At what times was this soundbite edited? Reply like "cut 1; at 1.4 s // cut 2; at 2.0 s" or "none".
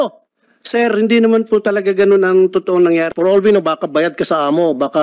cut 1; at 3.1 s